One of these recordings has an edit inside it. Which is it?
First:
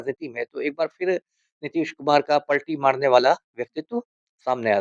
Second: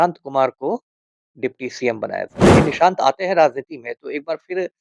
second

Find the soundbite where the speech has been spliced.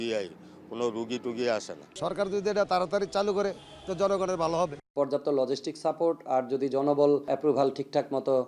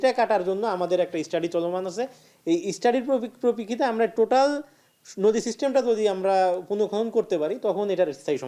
first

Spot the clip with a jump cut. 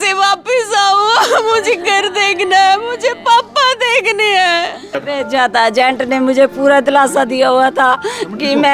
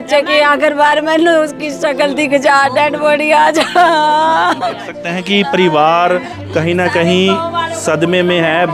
first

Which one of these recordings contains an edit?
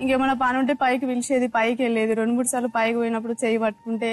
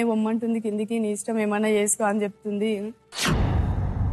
second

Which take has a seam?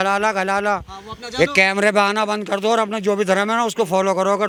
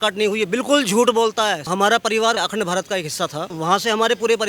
second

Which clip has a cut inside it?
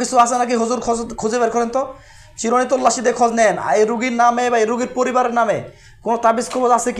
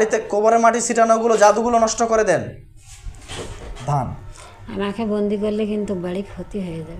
second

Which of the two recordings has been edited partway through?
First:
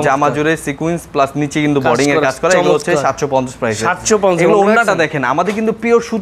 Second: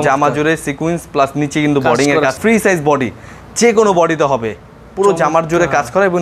second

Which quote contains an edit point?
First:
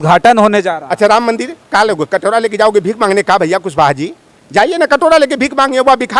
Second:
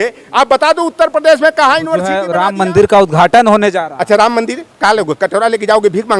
second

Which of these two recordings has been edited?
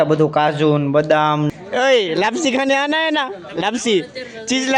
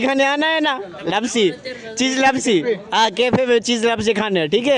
first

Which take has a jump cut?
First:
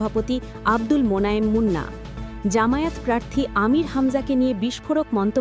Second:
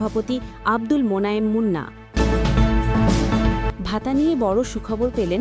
second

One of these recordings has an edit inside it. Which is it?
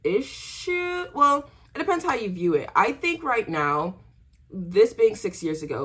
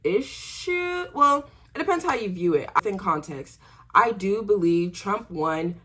second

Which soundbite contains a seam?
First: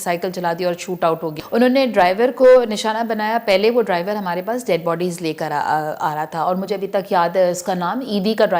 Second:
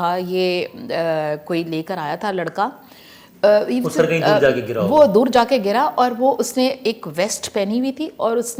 first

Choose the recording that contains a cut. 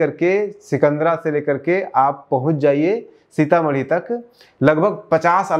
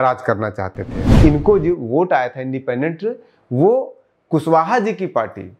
second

